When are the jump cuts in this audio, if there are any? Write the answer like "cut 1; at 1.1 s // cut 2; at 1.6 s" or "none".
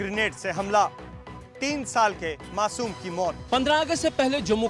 cut 1; at 3.4 s